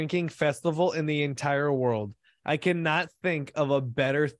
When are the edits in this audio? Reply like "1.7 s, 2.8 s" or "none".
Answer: none